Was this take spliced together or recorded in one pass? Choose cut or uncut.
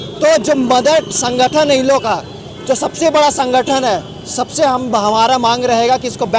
uncut